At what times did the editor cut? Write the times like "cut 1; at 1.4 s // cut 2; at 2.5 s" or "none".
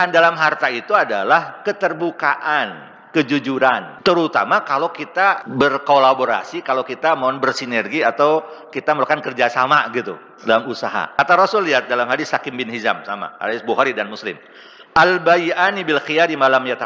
cut 1; at 3.9 s // cut 2; at 5.5 s // cut 3; at 11.2 s